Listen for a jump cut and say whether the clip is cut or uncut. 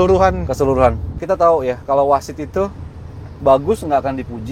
cut